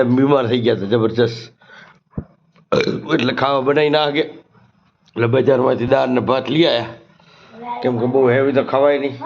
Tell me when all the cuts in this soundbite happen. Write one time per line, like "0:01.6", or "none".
none